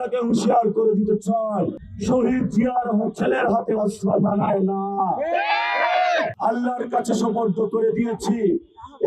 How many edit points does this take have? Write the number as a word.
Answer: two